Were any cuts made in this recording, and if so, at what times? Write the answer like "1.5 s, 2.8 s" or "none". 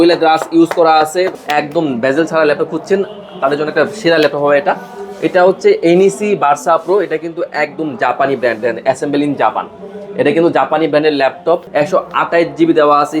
1.4 s, 11.7 s